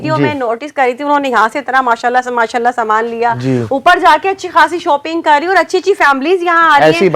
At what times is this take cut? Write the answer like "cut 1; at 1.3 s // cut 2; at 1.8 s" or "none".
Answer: none